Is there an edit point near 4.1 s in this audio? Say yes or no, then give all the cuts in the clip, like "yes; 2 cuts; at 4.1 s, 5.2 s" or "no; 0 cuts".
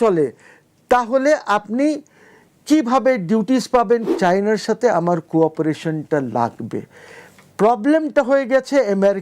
yes; 1 cut; at 4.1 s